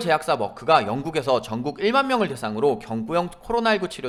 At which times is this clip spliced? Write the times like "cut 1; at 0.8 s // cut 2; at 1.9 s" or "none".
none